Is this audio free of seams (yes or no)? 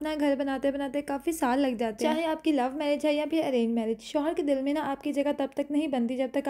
yes